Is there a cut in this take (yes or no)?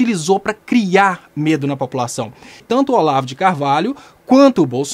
yes